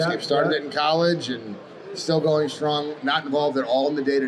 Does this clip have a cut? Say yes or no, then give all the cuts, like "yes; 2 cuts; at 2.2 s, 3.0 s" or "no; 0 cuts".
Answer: no; 0 cuts